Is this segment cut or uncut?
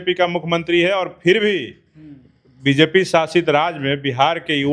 uncut